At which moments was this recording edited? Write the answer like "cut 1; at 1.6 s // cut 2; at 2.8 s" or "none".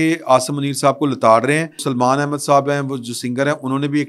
cut 1; at 1.8 s